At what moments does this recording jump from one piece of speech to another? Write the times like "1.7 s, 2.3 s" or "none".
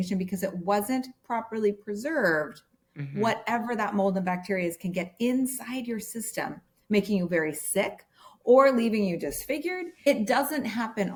none

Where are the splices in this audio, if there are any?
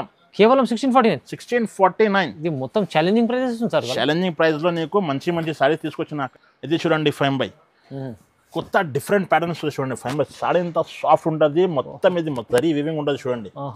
6.2 s

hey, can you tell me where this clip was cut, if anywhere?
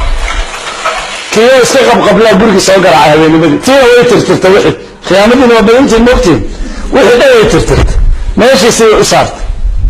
1.1 s

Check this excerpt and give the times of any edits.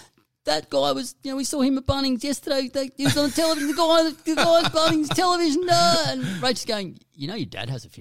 none

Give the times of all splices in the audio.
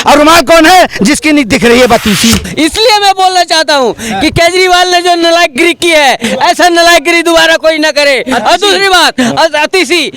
2.5 s

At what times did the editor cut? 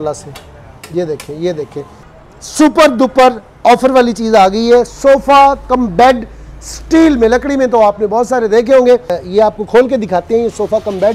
2.1 s, 9.2 s

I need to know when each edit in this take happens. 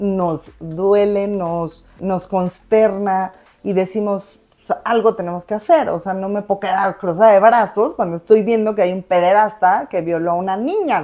2.0 s

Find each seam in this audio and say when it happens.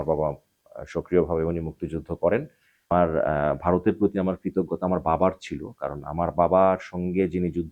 2.9 s

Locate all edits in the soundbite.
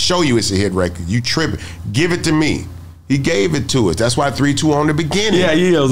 none

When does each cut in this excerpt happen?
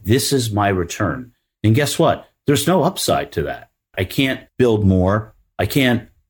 4.1 s

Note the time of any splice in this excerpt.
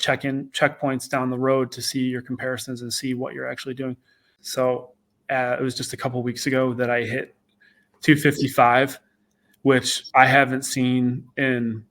4.4 s

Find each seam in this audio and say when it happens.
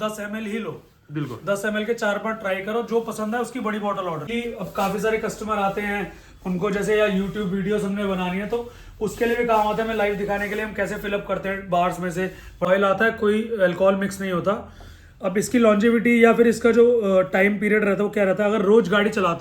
4.3 s, 12.7 s

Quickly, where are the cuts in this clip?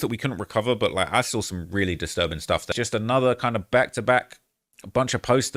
2.7 s

